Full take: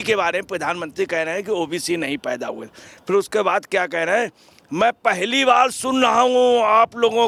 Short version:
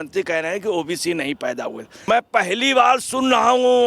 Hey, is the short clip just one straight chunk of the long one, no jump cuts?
no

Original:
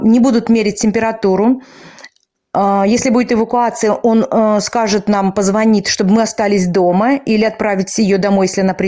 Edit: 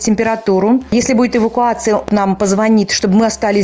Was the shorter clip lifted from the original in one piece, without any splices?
no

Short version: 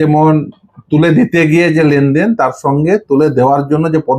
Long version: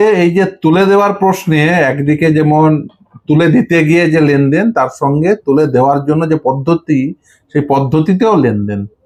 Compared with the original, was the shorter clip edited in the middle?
no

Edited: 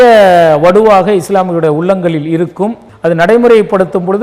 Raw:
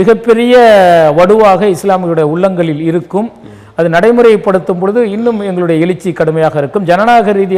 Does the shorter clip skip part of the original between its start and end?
yes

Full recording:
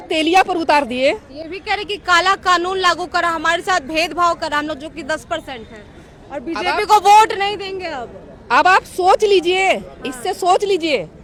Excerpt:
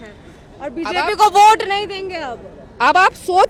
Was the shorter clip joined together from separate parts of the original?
no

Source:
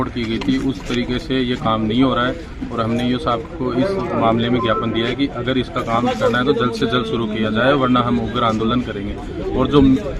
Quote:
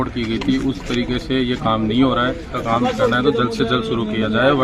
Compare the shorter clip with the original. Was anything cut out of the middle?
yes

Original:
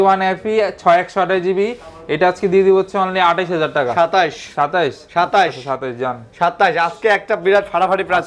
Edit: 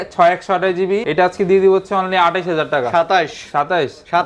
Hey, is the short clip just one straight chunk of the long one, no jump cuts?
no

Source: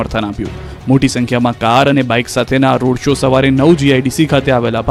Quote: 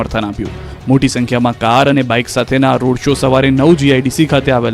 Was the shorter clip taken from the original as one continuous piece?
yes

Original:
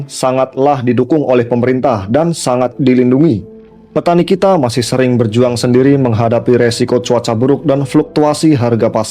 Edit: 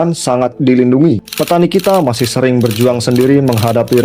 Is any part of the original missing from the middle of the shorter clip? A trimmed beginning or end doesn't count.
yes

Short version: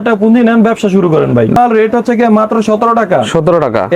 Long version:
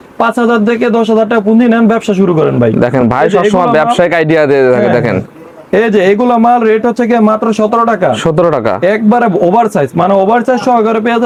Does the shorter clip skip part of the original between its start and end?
yes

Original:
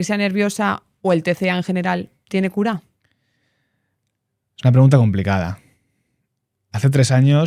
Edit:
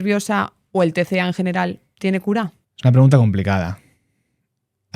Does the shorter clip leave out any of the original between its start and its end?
yes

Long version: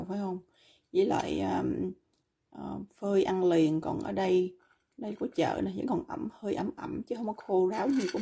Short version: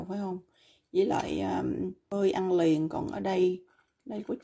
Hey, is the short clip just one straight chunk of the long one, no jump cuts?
no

